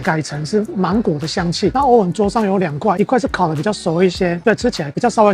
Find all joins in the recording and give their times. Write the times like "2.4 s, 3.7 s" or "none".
1.7 s

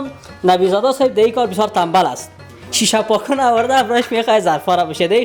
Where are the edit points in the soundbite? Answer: none

